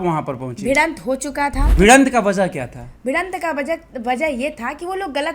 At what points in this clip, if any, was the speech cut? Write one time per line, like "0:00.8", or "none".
0:01.7